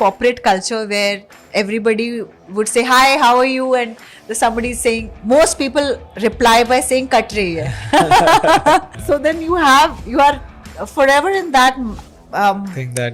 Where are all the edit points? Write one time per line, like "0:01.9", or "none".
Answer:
0:08.9